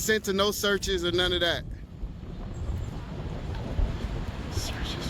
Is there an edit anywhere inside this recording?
no; 0 cuts

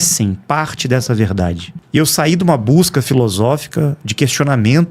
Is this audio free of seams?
no; 1 cut; at 1.7 s

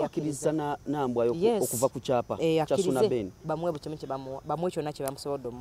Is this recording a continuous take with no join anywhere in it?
yes; 0 cuts

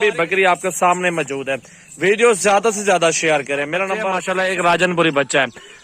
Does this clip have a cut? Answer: yes; 1 cut; at 4.2 s

